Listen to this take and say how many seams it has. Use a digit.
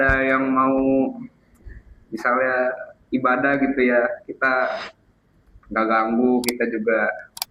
0